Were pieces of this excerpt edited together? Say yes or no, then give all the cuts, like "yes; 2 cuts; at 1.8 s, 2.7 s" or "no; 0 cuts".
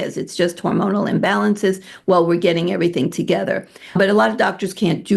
no; 0 cuts